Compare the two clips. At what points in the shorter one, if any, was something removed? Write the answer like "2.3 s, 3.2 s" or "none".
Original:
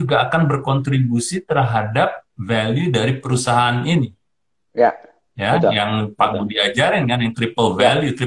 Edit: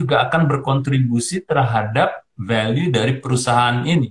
none